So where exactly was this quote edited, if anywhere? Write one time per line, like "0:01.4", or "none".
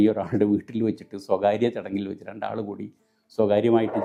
none